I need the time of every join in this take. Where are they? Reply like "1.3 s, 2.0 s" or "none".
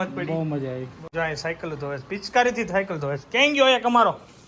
1.1 s